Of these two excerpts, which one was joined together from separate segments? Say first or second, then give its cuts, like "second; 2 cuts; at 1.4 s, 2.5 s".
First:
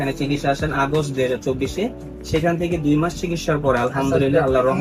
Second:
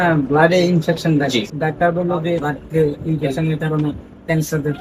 second; 2 cuts; at 1.5 s, 2.5 s